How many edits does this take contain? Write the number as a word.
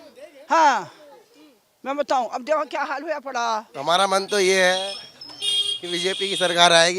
one